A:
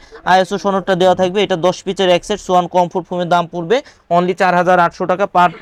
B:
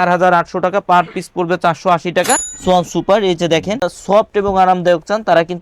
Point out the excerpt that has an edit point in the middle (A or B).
B